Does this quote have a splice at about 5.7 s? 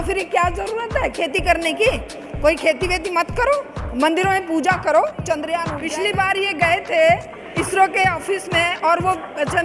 yes; 1 cut; at 5.7 s

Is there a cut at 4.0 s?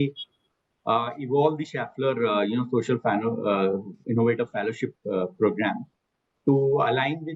no; 0 cuts

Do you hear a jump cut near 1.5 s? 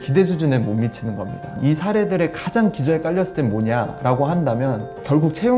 yes; 1 cut; at 1.5 s

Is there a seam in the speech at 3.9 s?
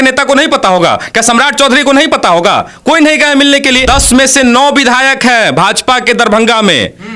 yes; 1 cut; at 3.9 s

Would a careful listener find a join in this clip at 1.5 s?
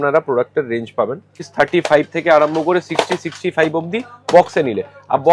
yes; 1 cut; at 1.5 s

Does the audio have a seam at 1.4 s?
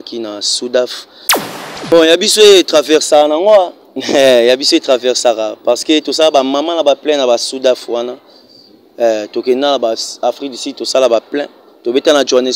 yes; 1 cut; at 1.4 s

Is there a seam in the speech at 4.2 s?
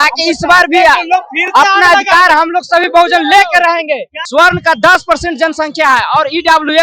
yes; 1 cut; at 4.2 s

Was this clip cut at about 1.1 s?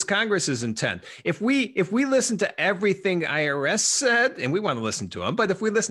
no; 0 cuts

